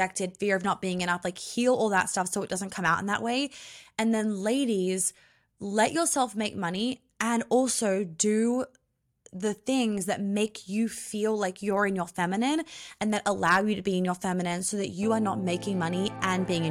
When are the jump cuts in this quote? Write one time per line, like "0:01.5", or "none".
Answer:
none